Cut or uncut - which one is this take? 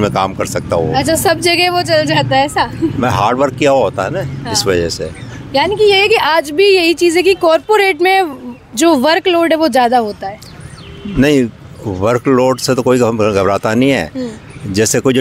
uncut